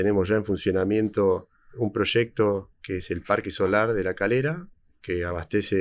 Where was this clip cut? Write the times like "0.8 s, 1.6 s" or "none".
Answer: 1.8 s